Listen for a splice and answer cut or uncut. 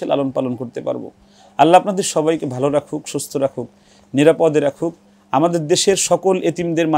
uncut